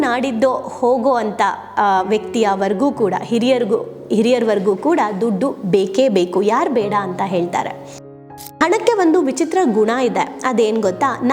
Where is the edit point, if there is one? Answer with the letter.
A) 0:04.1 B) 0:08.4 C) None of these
B